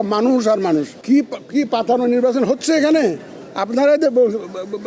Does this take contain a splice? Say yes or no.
yes